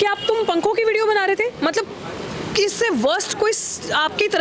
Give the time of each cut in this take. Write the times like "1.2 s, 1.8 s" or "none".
none